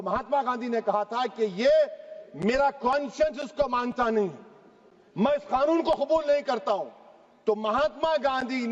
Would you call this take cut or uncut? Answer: uncut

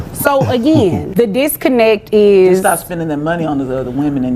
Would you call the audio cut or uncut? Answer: cut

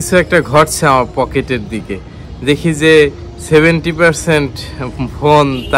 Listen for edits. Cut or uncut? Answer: cut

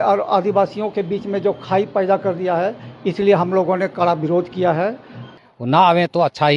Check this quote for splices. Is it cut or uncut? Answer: cut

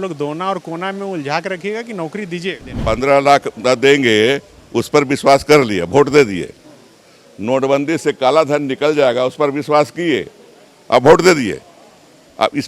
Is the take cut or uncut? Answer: cut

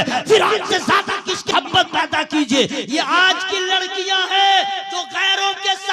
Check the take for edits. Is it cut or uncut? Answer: cut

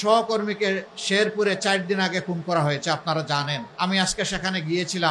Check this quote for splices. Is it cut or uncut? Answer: cut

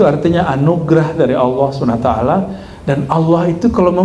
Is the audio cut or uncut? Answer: uncut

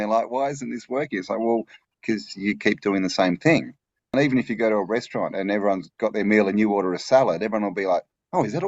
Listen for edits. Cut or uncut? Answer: cut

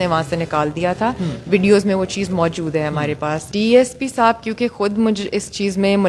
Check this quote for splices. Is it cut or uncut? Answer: cut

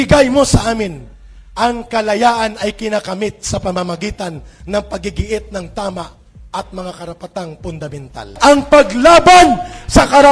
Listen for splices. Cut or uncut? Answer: cut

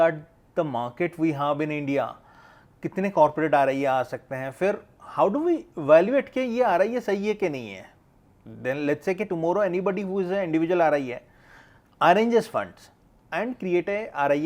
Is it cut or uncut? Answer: uncut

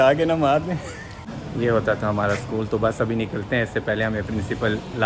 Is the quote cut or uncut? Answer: cut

